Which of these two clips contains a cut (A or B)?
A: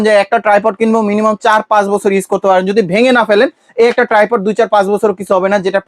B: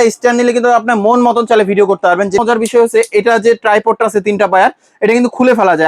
B